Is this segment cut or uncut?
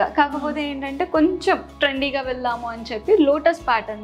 cut